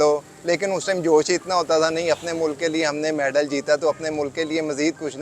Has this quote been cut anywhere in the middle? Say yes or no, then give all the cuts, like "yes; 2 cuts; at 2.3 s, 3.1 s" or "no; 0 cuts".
no; 0 cuts